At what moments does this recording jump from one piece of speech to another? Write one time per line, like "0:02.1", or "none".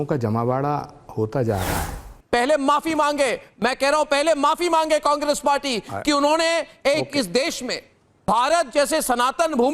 0:02.1